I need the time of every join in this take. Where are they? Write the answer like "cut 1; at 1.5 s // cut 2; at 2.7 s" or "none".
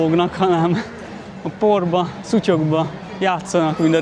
none